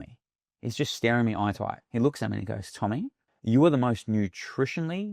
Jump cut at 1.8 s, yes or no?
yes